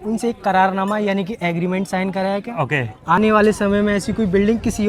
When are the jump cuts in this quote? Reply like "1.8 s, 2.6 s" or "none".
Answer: none